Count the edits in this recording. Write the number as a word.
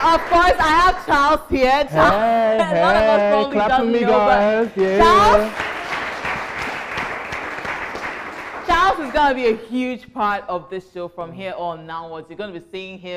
zero